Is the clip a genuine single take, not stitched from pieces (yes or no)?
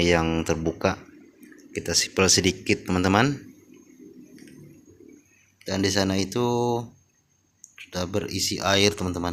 yes